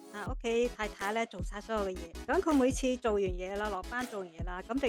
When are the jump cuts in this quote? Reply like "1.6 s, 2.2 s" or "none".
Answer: 2.1 s